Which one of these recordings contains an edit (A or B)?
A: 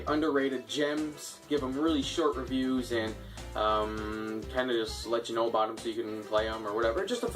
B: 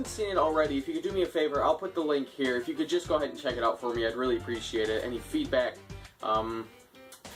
A